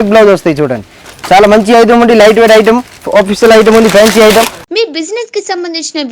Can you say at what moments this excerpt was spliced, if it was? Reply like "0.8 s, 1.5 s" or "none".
1.0 s, 4.6 s